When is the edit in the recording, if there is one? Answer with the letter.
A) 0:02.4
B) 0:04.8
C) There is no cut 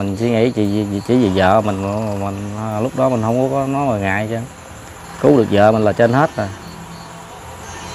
C